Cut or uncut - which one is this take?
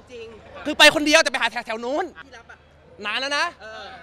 cut